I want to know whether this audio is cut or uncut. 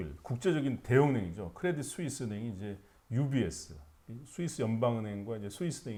uncut